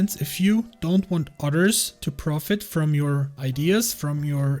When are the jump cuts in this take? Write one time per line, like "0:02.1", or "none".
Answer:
0:03.4